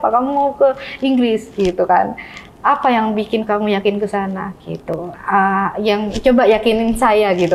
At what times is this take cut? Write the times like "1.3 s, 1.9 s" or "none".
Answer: none